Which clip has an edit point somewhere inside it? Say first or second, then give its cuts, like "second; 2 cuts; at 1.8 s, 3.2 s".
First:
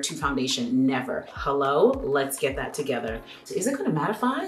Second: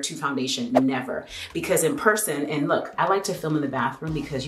first; 2 cuts; at 1.3 s, 3.4 s